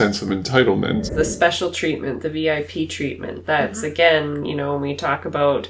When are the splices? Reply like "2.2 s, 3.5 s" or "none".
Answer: 1.1 s